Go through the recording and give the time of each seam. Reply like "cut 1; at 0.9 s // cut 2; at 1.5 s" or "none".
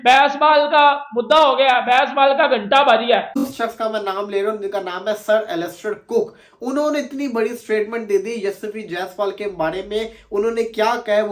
cut 1; at 3.4 s